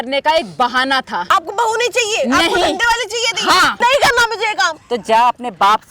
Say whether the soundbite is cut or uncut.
cut